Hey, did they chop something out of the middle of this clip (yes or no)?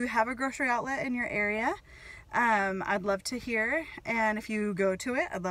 no